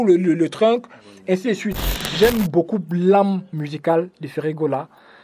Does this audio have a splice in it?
yes; 1 cut; at 1.9 s

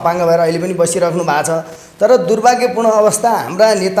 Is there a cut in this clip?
no; 0 cuts

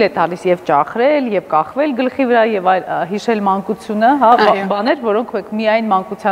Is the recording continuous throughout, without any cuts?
yes; 0 cuts

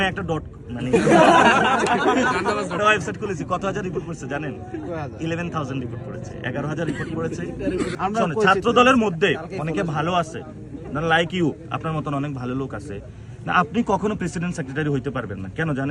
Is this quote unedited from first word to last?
no; 1 cut; at 7.9 s

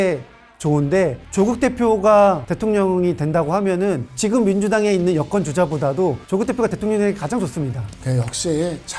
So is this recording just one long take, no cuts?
no; 2 cuts; at 1.2 s, 7.8 s

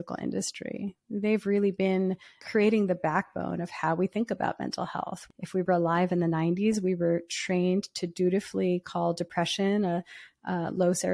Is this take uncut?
no; 2 cuts; at 2.3 s, 5.2 s

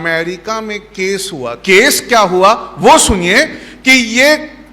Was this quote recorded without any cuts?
no; 1 cut; at 1.5 s

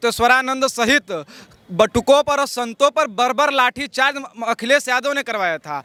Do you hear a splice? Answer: no; 0 cuts

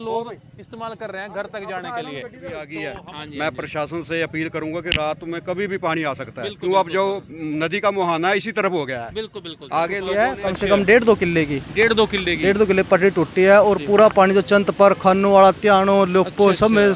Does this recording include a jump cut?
yes; 2 cuts; at 2.6 s, 10.0 s

